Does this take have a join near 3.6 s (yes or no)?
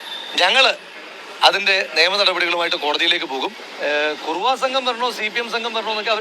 yes